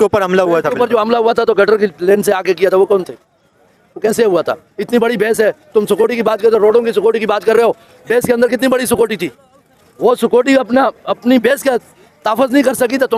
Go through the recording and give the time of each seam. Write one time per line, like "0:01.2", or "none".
none